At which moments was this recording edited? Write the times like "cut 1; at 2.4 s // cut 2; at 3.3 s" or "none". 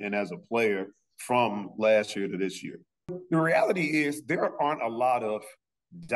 cut 1; at 3.2 s